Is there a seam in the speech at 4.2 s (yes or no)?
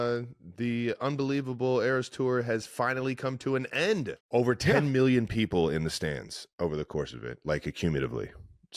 no